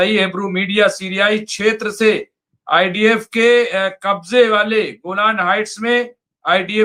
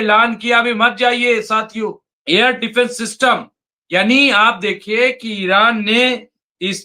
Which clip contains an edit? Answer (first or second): second